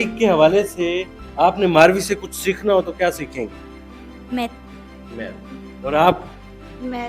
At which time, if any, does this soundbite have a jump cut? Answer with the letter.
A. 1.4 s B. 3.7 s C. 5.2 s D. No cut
D